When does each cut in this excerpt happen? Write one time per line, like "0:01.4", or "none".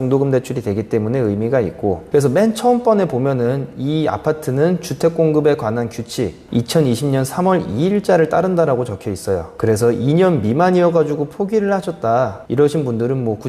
0:02.0